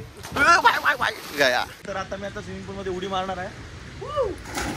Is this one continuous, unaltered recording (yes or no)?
no